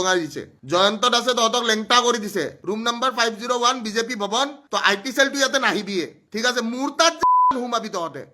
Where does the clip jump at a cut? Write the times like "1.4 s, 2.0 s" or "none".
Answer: 2.6 s, 4.6 s, 6.2 s